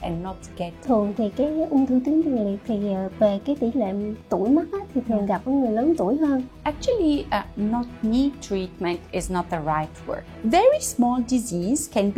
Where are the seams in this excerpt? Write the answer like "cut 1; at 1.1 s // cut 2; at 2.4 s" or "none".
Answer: cut 1; at 0.8 s // cut 2; at 6.5 s // cut 3; at 10.3 s